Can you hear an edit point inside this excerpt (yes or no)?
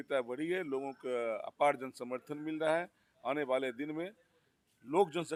no